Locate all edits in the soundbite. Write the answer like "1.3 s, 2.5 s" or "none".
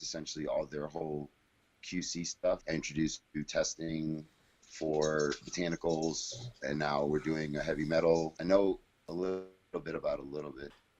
2.6 s, 8.4 s